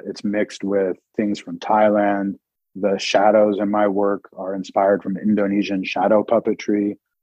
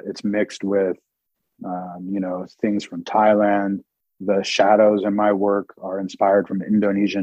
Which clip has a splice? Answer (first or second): first